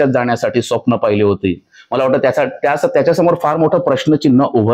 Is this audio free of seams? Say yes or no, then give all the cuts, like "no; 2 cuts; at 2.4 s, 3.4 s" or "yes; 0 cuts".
yes; 0 cuts